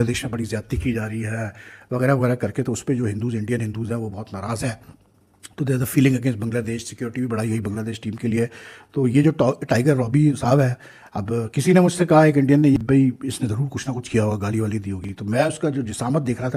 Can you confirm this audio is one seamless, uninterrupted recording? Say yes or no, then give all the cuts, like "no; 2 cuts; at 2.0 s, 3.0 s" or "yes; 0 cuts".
yes; 0 cuts